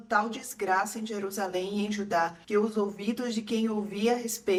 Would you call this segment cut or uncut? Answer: uncut